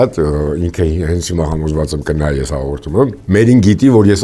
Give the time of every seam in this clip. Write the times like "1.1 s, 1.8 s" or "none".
3.2 s